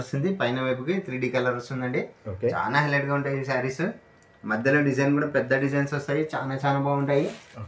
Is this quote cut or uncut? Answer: uncut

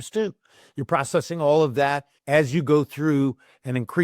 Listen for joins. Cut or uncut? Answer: cut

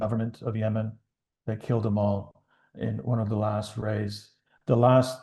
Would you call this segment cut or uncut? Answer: uncut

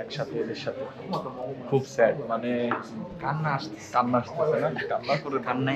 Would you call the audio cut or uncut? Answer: uncut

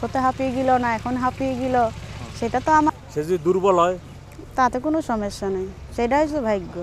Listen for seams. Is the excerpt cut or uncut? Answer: cut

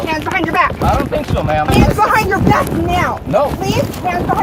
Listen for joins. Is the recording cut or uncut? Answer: cut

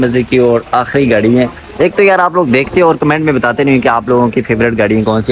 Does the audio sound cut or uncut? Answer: uncut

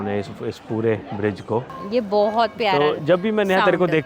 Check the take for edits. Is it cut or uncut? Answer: cut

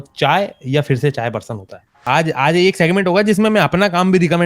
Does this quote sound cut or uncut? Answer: cut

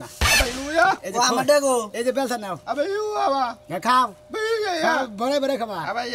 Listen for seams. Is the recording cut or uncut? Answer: uncut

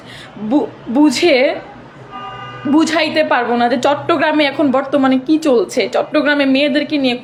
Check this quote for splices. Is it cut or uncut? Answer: uncut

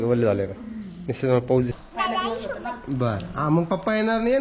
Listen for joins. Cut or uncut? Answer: cut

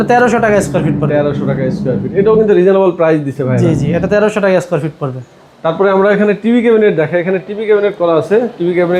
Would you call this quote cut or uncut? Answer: uncut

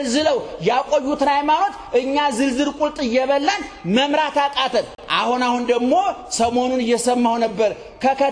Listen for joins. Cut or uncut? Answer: uncut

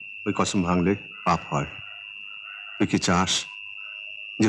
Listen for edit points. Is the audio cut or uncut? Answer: uncut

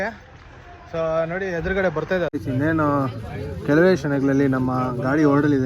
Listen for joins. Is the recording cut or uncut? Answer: cut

